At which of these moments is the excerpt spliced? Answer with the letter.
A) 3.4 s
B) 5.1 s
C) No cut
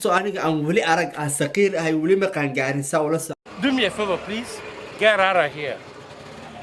C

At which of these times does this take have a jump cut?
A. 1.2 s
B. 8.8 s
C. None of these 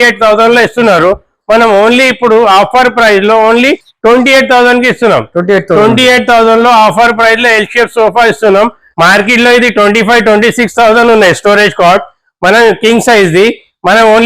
B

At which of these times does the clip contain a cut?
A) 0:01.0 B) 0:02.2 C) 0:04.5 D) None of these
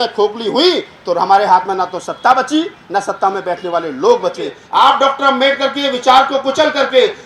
C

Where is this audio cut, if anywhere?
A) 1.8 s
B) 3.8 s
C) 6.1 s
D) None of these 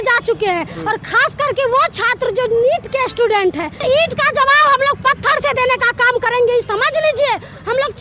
B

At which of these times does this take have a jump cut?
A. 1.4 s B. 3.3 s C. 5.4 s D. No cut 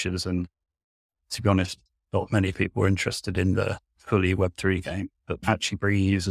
C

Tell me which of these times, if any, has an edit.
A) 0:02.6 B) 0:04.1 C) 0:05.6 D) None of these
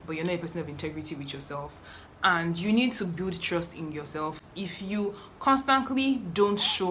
D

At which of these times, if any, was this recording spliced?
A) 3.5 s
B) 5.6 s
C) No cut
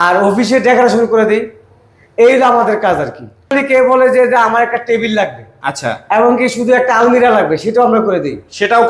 A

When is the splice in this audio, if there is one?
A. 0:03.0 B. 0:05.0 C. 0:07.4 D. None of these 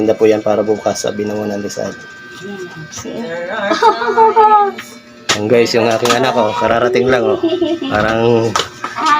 A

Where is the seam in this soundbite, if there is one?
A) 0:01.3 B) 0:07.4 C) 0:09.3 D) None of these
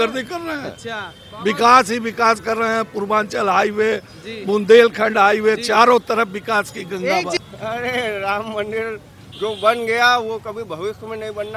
B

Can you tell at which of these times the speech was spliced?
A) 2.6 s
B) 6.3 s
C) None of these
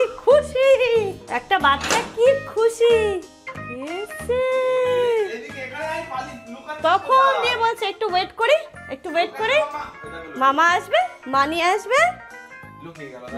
C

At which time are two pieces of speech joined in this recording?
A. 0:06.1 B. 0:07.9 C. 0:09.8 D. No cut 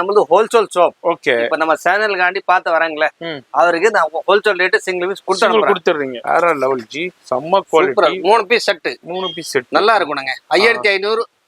A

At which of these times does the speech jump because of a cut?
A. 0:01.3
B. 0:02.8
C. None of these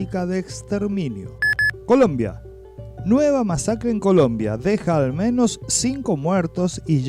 A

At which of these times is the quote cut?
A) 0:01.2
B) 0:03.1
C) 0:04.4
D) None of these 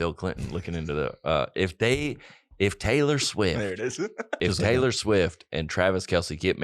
C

